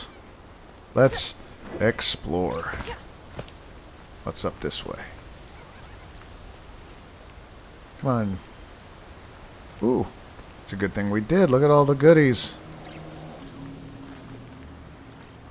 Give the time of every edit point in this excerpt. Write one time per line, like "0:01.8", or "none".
0:13.4